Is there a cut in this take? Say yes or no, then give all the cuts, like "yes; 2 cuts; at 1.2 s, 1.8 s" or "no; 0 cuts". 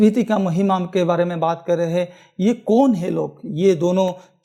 no; 0 cuts